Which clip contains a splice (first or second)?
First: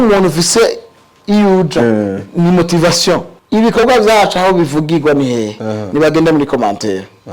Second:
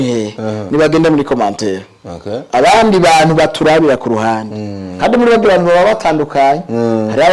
first